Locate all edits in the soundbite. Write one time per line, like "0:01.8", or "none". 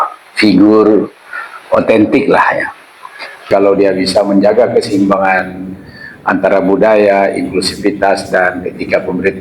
0:03.5